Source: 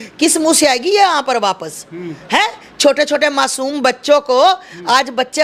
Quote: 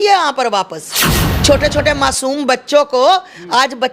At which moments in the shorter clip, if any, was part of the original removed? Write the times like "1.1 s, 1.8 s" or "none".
1.3 s